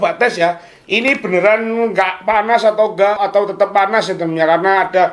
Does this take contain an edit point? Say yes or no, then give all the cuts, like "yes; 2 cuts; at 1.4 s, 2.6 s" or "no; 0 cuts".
yes; 1 cut; at 3.2 s